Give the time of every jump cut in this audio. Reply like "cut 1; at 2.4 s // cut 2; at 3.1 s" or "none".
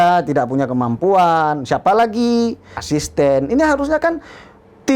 cut 1; at 2.7 s